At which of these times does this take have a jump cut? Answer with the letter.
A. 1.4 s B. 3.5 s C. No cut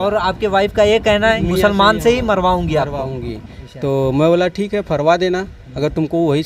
A